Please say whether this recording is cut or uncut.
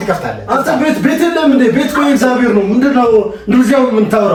uncut